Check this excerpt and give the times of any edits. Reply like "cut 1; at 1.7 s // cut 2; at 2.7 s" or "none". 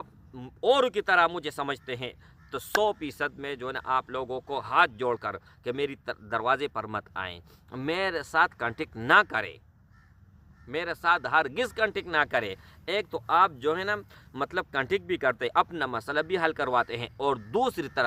none